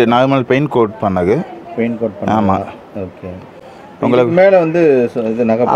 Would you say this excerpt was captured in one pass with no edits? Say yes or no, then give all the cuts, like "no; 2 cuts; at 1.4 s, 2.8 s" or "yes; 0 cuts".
yes; 0 cuts